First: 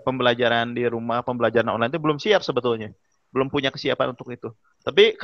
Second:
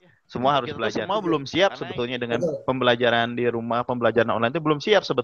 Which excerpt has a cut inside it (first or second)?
second